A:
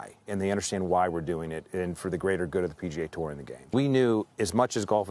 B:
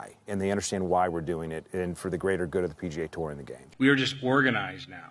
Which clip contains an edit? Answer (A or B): B